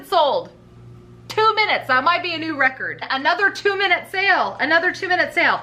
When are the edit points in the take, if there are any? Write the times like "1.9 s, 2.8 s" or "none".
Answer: 3.0 s